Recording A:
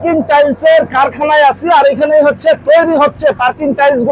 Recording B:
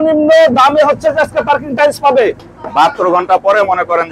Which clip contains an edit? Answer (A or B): B